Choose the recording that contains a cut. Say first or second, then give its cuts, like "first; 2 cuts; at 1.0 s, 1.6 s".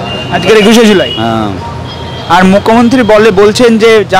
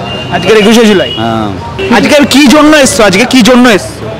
second; 1 cut; at 1.7 s